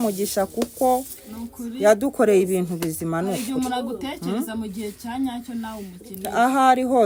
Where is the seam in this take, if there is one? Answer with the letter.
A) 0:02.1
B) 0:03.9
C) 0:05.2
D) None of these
D